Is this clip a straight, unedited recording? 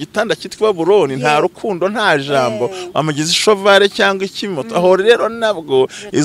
yes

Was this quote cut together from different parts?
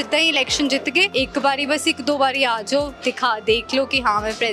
yes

